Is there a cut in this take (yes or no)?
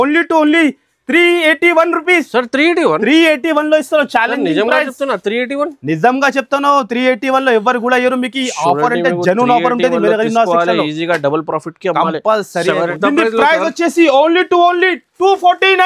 yes